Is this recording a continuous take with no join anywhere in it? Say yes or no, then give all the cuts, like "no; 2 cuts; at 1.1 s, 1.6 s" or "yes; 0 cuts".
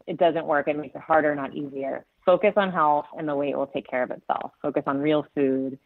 no; 1 cut; at 2.2 s